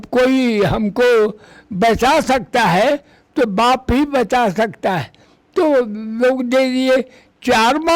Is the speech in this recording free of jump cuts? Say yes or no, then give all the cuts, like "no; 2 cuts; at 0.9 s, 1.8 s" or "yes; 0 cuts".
yes; 0 cuts